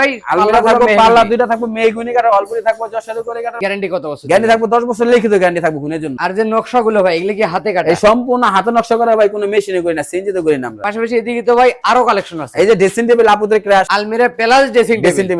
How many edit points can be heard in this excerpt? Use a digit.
4